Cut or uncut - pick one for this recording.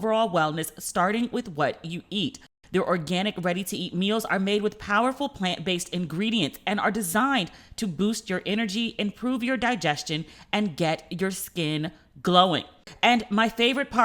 cut